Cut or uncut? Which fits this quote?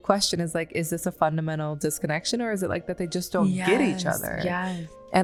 uncut